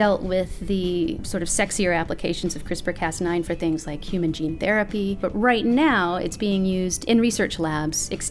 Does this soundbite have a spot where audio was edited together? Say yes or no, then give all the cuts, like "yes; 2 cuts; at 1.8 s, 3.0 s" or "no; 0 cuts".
yes; 2 cuts; at 1.2 s, 5.2 s